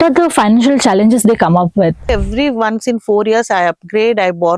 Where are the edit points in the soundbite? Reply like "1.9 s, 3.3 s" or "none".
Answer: 2.1 s